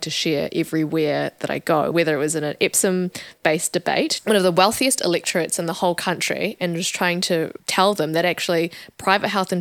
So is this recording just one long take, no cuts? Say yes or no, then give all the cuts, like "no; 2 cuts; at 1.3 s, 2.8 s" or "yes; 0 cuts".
no; 2 cuts; at 1.9 s, 4.2 s